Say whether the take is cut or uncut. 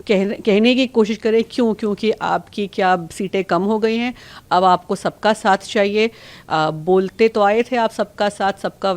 uncut